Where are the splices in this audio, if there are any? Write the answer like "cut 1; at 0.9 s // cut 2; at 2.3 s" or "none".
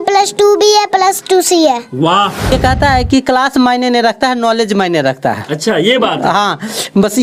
cut 1; at 2.5 s